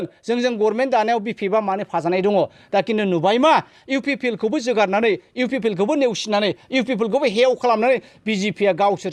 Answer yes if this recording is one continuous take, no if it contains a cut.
yes